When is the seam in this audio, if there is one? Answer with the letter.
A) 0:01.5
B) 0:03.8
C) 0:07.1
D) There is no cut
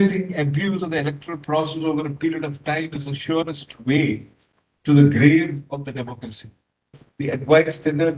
C